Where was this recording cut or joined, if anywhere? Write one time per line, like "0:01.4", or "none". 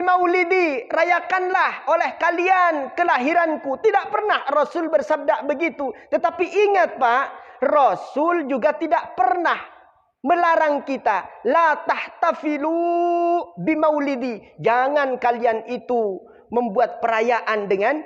none